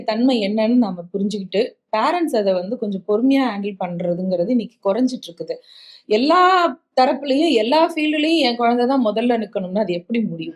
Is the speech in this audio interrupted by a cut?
no; 0 cuts

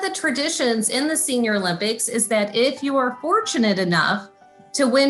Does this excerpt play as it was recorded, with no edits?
yes; 0 cuts

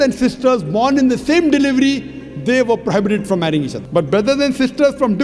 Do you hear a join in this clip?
yes; 1 cut; at 3.8 s

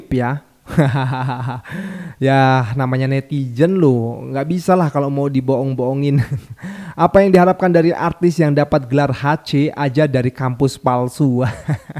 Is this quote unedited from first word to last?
yes; 0 cuts

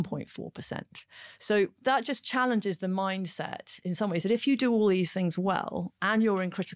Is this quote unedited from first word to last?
yes; 0 cuts

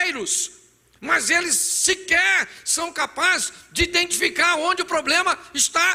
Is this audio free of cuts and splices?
yes; 0 cuts

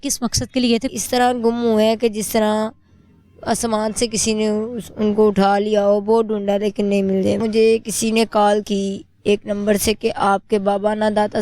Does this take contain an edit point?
yes; 2 cuts; at 1.0 s, 7.4 s

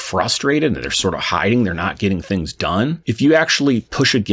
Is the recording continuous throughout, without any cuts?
no; 1 cut; at 3.0 s

